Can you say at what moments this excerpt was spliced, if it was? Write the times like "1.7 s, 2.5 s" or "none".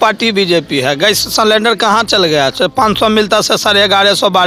none